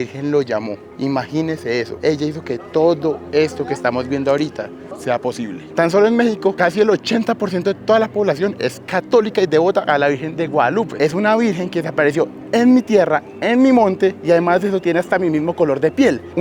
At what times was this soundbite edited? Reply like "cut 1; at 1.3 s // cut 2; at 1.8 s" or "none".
cut 1; at 1.9 s // cut 2; at 5.7 s // cut 3; at 6.6 s // cut 4; at 10.9 s